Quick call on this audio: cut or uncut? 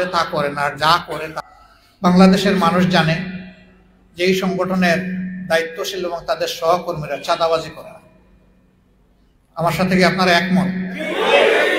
cut